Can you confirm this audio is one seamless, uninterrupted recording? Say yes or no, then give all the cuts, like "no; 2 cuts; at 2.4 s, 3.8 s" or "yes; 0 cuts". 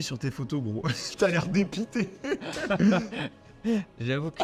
yes; 0 cuts